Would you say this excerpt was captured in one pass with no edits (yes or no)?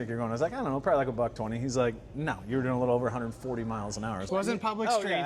no